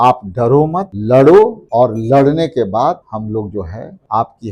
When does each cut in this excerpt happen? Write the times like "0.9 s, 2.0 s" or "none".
0.9 s, 1.6 s, 3.3 s